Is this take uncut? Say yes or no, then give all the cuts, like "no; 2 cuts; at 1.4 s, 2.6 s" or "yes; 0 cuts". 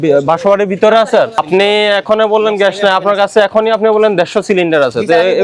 no; 1 cut; at 1.4 s